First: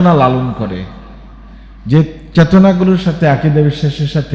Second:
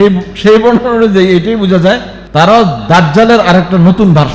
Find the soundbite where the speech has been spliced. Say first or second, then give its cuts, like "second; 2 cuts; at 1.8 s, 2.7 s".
second; 1 cut; at 2.1 s